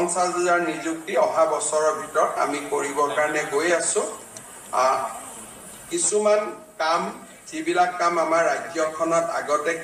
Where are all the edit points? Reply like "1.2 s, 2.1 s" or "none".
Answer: none